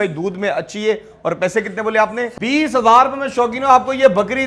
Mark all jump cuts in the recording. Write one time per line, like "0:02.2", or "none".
0:02.3